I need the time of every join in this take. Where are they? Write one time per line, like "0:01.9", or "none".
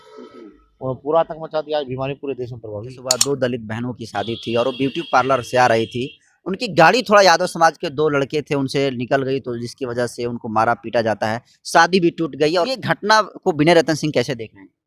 0:03.0
0:12.7